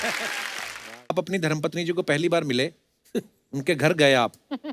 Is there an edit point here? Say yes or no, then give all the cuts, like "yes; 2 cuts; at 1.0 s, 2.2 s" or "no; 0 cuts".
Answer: yes; 1 cut; at 1.1 s